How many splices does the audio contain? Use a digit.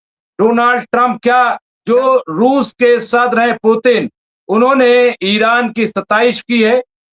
1